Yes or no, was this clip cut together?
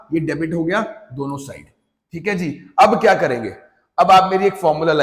no